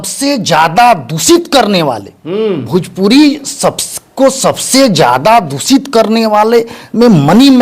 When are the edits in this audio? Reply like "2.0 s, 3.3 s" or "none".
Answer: none